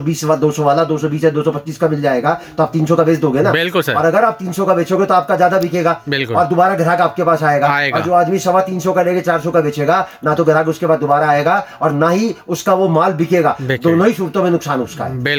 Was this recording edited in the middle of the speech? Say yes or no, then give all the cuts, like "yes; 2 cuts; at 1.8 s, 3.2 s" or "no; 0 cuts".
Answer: no; 0 cuts